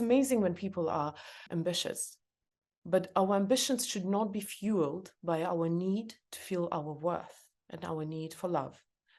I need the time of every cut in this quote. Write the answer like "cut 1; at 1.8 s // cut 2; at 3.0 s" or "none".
cut 1; at 1.3 s

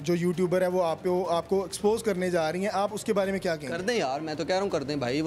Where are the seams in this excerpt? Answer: none

